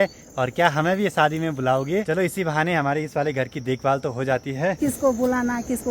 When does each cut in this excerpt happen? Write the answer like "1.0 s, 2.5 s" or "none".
2.0 s, 4.8 s